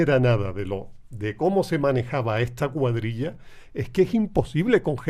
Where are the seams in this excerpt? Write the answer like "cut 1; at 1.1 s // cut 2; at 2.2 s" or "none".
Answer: none